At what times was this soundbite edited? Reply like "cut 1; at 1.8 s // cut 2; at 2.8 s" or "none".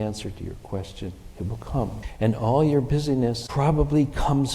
cut 1; at 2.1 s // cut 2; at 3.4 s